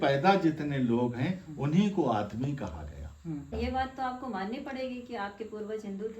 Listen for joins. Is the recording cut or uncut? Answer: cut